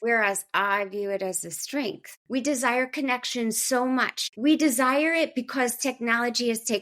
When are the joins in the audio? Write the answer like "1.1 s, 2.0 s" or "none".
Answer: 2.1 s, 4.2 s